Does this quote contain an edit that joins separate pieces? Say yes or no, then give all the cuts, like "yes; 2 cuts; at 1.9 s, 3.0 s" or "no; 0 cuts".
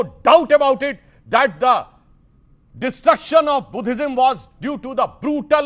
no; 0 cuts